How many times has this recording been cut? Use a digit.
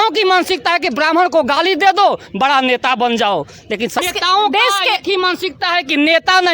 1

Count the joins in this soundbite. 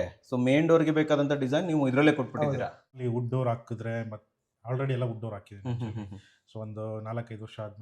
1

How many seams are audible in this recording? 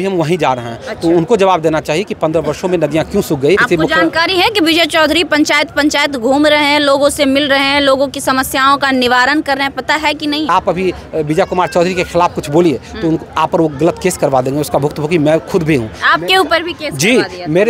2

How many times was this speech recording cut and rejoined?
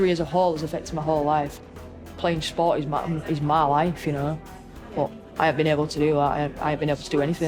1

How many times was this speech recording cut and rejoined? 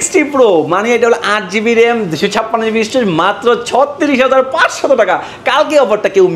0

